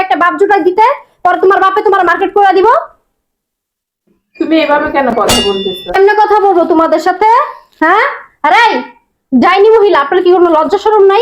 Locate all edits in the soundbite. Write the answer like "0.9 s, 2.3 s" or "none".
5.3 s